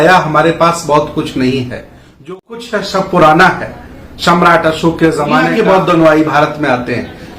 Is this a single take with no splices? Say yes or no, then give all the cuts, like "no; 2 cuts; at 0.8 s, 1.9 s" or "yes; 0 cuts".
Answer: no; 1 cut; at 5.5 s